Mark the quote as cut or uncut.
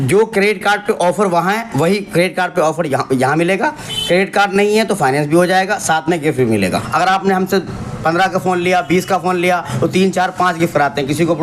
cut